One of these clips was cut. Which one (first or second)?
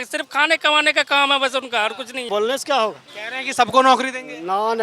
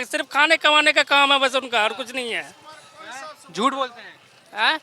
first